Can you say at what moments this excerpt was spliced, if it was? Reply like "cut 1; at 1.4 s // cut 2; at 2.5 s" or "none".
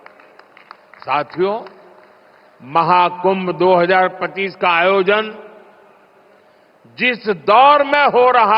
cut 1; at 4.2 s